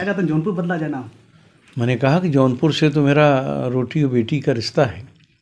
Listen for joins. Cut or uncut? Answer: uncut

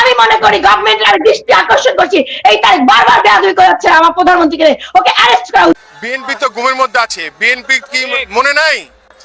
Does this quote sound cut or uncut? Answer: cut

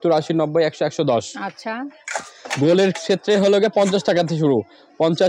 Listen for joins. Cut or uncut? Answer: uncut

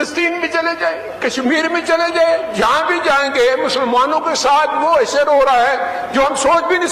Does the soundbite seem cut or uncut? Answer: uncut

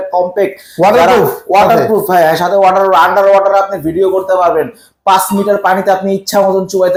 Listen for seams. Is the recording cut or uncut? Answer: uncut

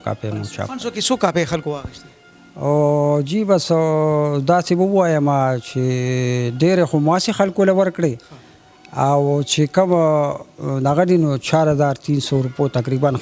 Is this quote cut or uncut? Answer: uncut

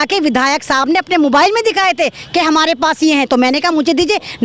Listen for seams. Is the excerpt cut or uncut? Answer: uncut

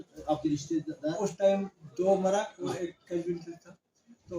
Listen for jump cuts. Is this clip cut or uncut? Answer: uncut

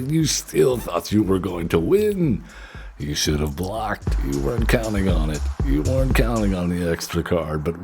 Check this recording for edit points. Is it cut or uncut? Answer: cut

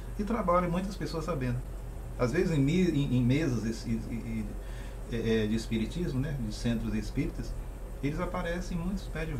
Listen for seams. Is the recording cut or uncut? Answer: uncut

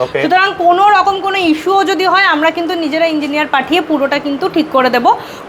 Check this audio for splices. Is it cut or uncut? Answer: uncut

